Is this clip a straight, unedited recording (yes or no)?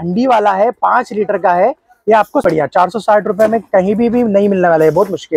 no